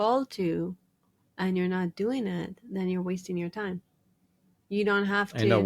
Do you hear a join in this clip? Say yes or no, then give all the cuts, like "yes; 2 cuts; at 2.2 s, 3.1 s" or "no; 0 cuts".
no; 0 cuts